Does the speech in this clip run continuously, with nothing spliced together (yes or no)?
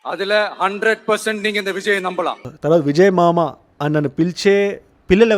yes